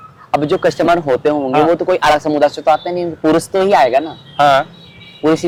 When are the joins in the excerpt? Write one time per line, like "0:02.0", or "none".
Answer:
none